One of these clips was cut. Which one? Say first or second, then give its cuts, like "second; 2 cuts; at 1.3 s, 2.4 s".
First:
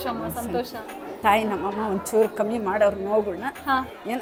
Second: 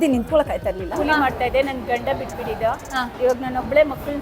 second; 1 cut; at 1.0 s